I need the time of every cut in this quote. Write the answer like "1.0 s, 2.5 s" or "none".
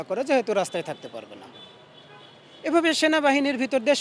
none